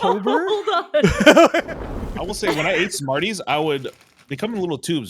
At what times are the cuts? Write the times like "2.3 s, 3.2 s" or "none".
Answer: 1.6 s